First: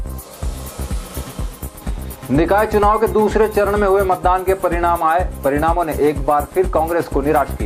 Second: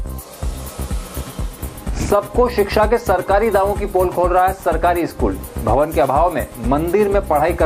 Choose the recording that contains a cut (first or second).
second